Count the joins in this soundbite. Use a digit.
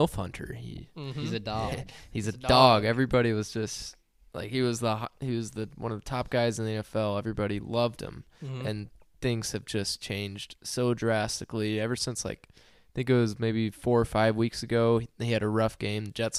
0